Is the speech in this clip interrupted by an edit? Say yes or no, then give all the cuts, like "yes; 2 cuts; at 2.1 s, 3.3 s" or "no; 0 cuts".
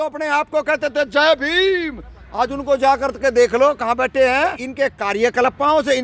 yes; 1 cut; at 4.6 s